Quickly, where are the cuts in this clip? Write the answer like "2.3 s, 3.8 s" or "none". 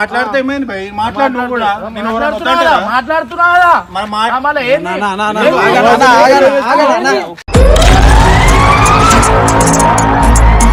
none